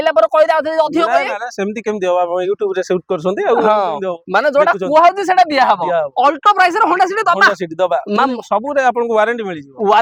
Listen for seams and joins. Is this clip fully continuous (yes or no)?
yes